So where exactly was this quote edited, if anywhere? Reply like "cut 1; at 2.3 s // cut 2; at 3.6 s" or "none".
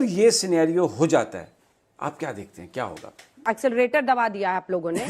cut 1; at 3.5 s